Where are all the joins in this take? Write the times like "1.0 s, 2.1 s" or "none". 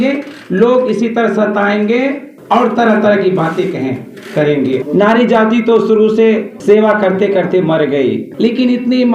2.3 s, 4.8 s, 6.5 s, 8.3 s